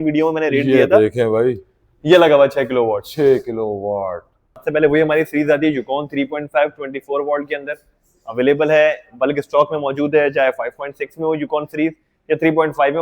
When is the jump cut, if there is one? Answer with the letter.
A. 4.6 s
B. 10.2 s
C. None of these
A